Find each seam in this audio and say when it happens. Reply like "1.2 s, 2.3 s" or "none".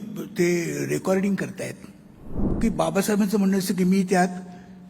2.4 s